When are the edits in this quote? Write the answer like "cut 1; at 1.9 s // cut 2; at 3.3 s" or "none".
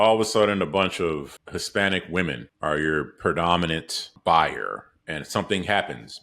cut 1; at 1.3 s // cut 2; at 2.5 s // cut 3; at 4.1 s